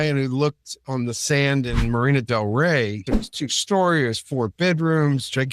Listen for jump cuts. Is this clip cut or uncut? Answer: cut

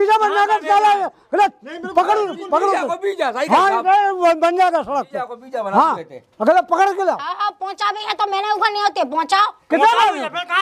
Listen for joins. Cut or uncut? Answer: uncut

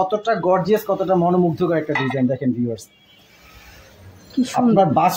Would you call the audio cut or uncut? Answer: uncut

